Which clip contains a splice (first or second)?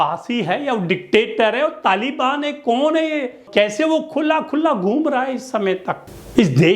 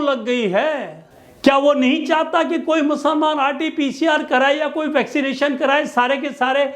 first